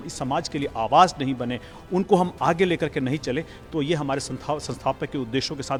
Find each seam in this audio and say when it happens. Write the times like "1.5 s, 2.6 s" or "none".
none